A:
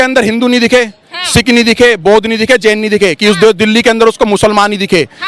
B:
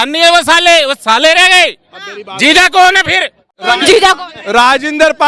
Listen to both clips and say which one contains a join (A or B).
B